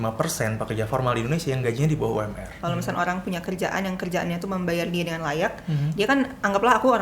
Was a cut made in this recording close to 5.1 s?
no; 1 cut; at 2.5 s

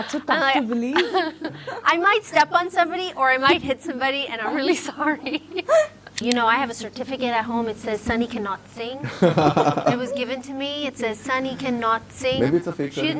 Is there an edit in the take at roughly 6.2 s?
yes; 1 cut; at 6.2 s

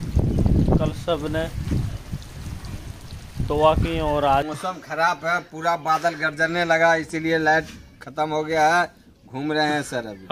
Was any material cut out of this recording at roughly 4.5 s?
yes; 1 cut; at 4.5 s

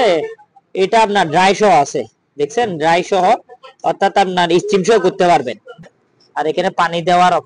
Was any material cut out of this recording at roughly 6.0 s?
yes; 1 cut; at 6.0 s

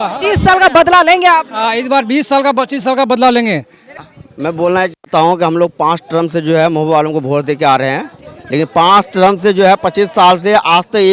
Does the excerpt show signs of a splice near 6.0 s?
no; 1 cut; at 3.8 s

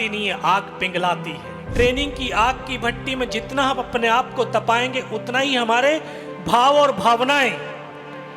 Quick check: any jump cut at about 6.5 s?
no; 1 cut; at 1.7 s

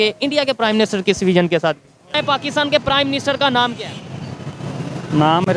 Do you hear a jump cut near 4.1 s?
no; 1 cut; at 2.2 s

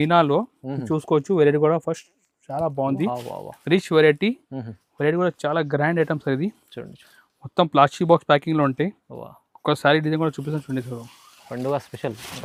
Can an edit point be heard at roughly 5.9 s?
no; 0 cuts

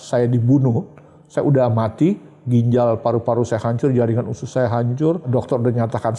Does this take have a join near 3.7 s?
no; 1 cut; at 5.3 s

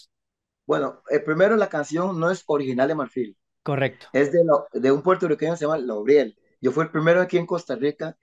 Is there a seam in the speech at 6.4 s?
yes; 1 cut; at 6.4 s

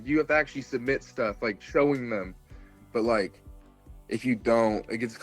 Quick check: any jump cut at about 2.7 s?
yes; 1 cut; at 2.7 s

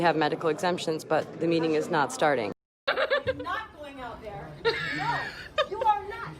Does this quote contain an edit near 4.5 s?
no; 1 cut; at 2.5 s

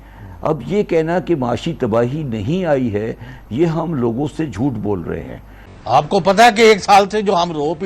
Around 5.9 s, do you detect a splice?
yes; 1 cut; at 5.9 s

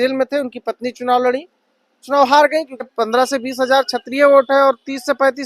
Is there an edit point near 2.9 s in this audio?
yes; 1 cut; at 2.9 s

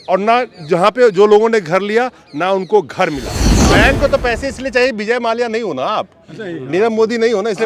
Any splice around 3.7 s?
yes; 1 cut; at 3.7 s

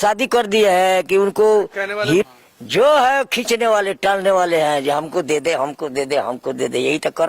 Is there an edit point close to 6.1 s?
no; 1 cut; at 2.2 s

